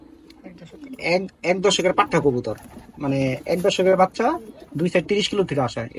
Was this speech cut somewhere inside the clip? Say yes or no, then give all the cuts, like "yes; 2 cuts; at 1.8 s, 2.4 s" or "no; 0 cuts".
no; 0 cuts